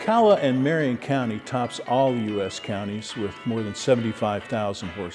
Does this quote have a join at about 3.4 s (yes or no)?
yes